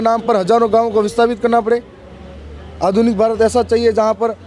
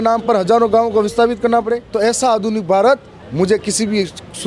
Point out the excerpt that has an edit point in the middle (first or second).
second